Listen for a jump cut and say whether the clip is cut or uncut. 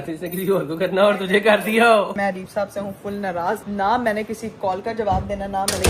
cut